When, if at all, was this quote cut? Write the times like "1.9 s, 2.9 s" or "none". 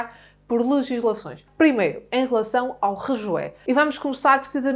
1.4 s, 3.6 s